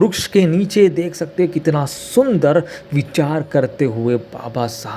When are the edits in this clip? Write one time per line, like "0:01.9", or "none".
none